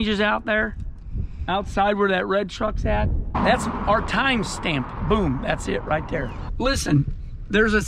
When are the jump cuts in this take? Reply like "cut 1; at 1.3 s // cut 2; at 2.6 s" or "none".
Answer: cut 1; at 3.3 s // cut 2; at 6.4 s